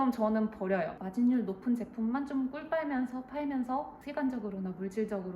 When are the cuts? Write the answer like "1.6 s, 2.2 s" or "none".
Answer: 1.0 s